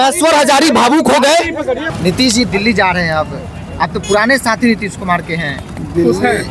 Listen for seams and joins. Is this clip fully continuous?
yes; 0 cuts

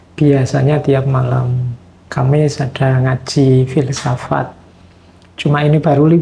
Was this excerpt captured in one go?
yes; 0 cuts

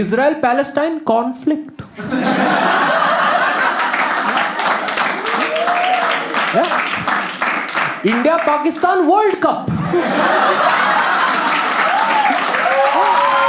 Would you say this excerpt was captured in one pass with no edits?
yes; 0 cuts

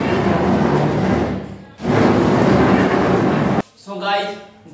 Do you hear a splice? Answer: yes; 1 cut; at 3.6 s

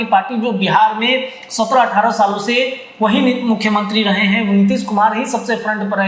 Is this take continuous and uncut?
yes; 0 cuts

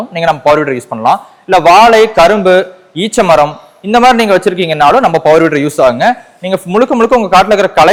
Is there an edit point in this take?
no; 0 cuts

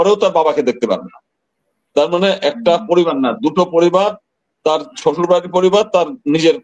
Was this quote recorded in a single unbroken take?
yes; 0 cuts

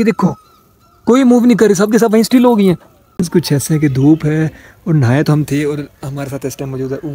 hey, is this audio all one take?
no; 1 cut; at 3.1 s

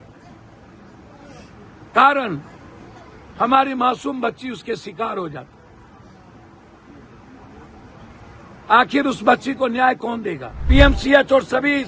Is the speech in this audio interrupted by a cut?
yes; 1 cut; at 10.6 s

